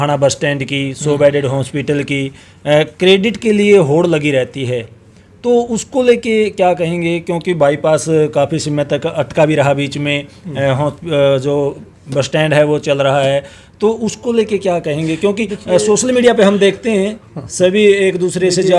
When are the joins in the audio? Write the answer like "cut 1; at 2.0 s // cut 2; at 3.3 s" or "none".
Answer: none